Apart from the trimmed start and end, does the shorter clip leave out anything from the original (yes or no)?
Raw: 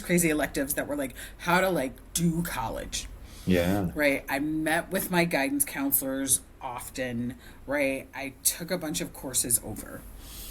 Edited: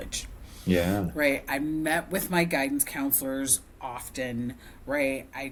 no